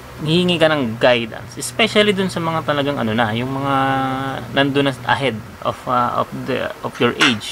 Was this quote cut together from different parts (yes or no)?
no